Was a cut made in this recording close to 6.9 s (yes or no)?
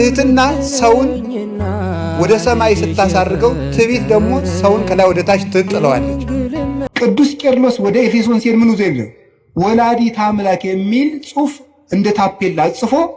yes